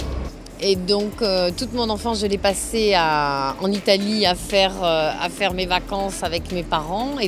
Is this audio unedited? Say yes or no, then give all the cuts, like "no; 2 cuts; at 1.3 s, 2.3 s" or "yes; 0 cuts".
no; 1 cut; at 4.8 s